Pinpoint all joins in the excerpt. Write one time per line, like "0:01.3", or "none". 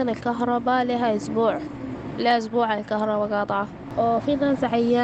0:03.8